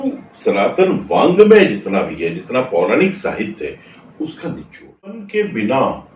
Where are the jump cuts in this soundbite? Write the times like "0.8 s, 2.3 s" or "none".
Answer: 5.2 s